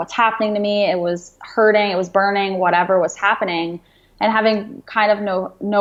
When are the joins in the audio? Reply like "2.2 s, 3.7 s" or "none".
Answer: none